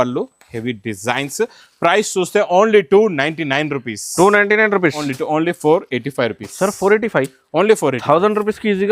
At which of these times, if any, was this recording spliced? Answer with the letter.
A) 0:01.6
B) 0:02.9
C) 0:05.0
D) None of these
C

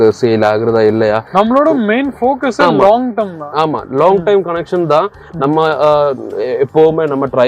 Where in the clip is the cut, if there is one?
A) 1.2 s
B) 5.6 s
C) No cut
C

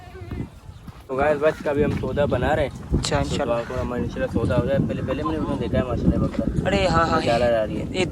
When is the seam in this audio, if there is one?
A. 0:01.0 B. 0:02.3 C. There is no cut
A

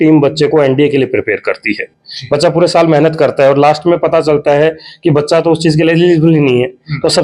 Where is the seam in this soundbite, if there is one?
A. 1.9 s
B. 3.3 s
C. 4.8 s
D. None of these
A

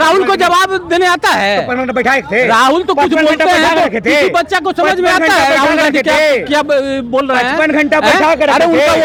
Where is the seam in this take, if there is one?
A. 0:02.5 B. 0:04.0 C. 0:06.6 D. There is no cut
D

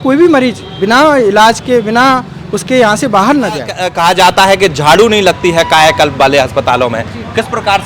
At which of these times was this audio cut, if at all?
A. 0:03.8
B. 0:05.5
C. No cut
A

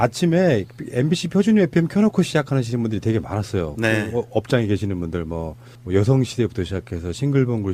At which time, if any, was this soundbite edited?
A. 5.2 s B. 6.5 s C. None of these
C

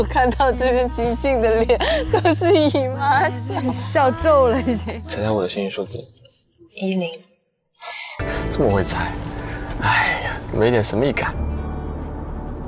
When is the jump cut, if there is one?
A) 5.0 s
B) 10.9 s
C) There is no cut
A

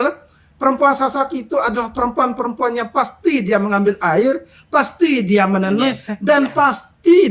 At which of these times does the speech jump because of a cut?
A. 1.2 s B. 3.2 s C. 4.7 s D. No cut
D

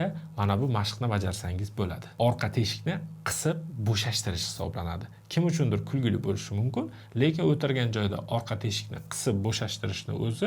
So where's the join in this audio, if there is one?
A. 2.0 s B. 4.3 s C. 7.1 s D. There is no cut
A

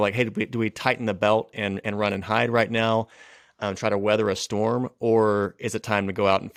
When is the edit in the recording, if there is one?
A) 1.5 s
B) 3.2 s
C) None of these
C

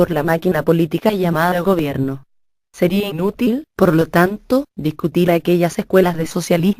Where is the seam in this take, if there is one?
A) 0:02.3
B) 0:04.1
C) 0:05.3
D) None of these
B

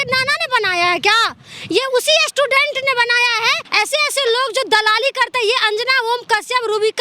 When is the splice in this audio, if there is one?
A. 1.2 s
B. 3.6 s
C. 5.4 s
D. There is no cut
B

